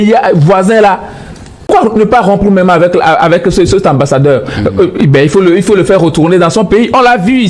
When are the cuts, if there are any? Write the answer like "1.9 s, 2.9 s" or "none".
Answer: 1.7 s